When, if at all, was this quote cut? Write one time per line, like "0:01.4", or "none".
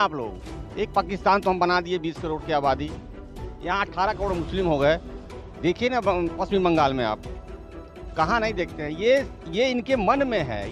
none